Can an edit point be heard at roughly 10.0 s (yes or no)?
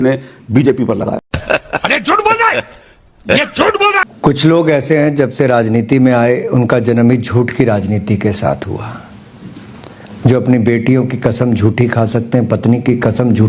no